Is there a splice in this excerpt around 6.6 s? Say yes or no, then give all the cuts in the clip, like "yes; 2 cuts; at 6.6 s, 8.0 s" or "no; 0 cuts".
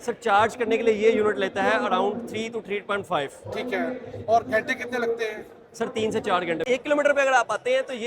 yes; 1 cut; at 6.6 s